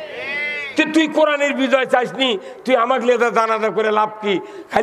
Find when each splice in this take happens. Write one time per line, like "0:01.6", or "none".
none